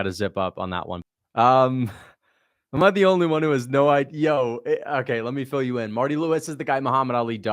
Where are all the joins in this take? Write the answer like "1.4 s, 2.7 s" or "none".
0.9 s